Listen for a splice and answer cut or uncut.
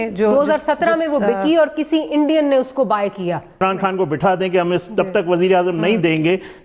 cut